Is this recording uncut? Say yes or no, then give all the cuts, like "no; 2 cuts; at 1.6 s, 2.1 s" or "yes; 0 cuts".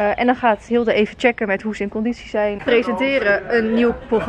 no; 1 cut; at 2.6 s